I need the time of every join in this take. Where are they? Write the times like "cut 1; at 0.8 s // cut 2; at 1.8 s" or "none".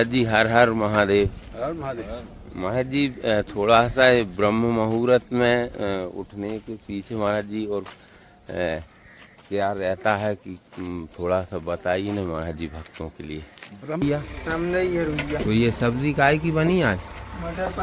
cut 1; at 14.0 s